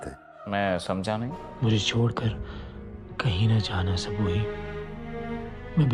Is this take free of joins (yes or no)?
no